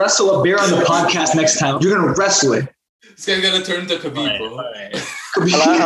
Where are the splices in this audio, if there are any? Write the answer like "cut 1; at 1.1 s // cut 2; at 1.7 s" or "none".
cut 1; at 1.7 s